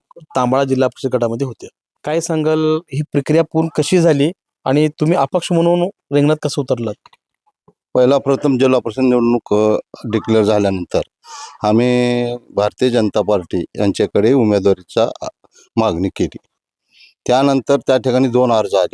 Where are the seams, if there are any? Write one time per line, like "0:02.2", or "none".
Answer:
0:02.0